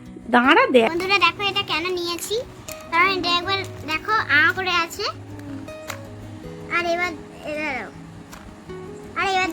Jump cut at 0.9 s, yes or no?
yes